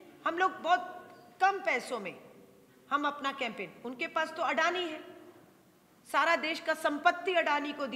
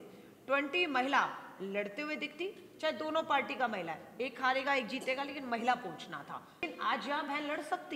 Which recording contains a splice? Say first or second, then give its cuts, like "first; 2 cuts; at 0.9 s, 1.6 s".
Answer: second; 1 cut; at 6.7 s